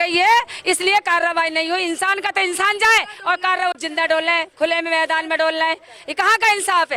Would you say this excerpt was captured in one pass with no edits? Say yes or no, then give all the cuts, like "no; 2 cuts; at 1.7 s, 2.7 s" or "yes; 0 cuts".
yes; 0 cuts